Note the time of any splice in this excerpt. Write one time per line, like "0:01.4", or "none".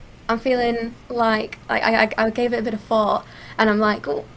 0:01.0